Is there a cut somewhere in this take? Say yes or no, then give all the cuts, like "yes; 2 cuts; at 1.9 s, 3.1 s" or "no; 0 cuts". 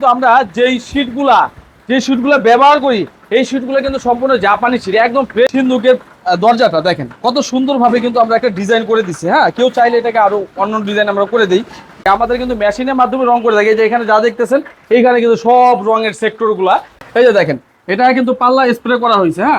yes; 3 cuts; at 5.5 s, 12.0 s, 17.0 s